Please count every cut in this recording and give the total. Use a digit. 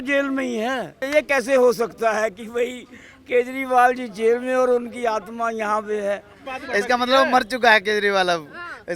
2